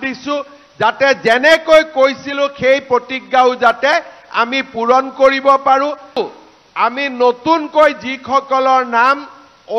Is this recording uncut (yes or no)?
no